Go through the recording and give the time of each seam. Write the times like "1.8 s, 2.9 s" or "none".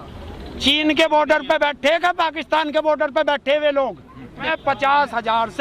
4.4 s